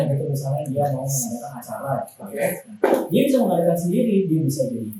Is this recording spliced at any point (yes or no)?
no